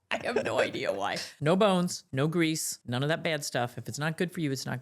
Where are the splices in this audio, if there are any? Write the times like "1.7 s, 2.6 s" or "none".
1.3 s, 2.0 s, 2.7 s